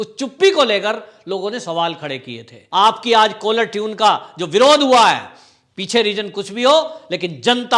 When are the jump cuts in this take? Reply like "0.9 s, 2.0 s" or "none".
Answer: 2.5 s